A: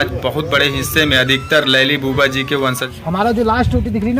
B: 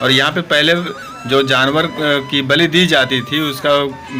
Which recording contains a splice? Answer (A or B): A